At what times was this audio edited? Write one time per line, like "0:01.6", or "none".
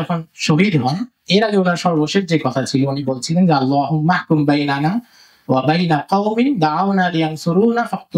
none